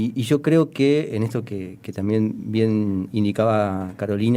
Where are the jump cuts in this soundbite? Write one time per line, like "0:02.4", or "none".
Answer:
none